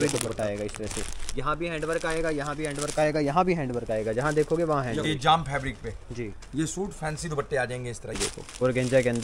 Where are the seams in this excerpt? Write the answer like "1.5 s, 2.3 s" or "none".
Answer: 5.1 s, 8.2 s

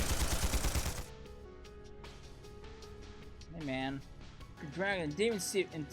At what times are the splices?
4.7 s

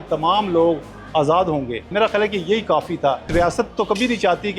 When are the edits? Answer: 1.9 s, 3.3 s

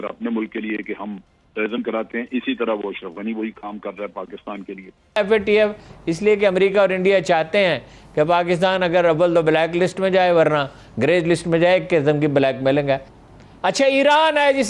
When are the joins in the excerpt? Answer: 4.9 s, 13.2 s

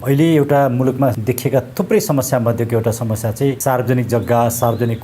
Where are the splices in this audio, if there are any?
1.2 s, 3.6 s

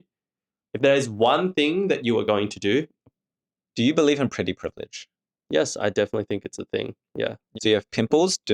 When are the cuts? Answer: 3.0 s, 7.4 s

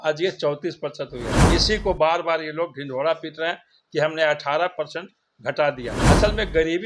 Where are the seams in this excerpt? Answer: 1.4 s, 5.9 s

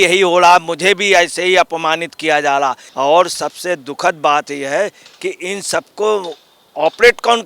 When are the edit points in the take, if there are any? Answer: 2.8 s

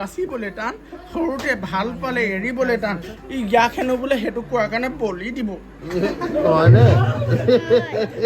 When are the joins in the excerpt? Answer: 7.4 s

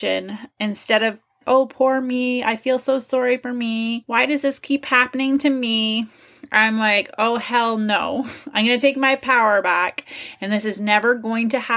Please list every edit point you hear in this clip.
1.4 s, 4.0 s

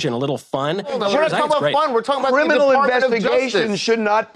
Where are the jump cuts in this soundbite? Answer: 1.0 s

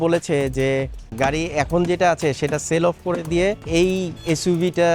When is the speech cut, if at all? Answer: 1.0 s, 3.6 s

